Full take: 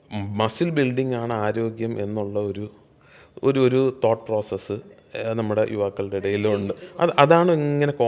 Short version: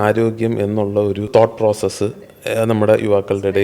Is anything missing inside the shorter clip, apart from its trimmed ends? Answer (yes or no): yes